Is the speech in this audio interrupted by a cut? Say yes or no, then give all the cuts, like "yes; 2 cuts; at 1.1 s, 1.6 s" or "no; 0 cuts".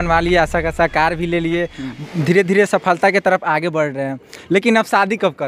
no; 0 cuts